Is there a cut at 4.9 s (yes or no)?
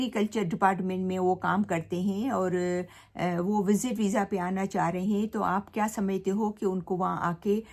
no